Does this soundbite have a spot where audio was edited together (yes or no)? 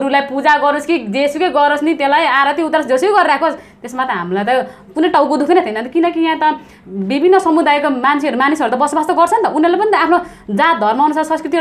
no